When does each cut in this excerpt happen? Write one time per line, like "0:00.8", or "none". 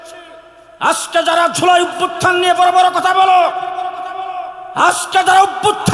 none